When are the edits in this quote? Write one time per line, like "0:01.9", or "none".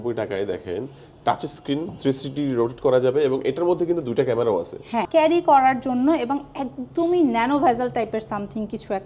0:05.1

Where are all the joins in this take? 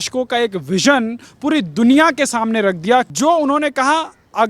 0:03.1

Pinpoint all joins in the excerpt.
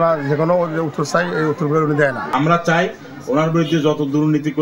0:02.2

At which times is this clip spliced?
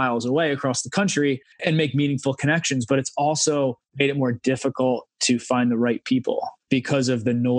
0:06.5

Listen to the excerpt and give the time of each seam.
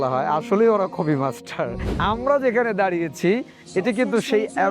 0:01.9

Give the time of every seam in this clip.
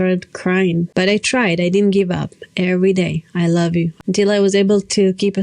0:00.9
0:03.9

